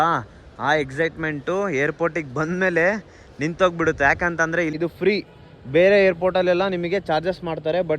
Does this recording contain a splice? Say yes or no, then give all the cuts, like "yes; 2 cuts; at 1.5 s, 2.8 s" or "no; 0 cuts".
yes; 1 cut; at 4.8 s